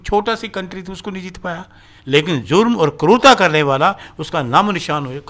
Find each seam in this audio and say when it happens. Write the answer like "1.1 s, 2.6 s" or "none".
1.9 s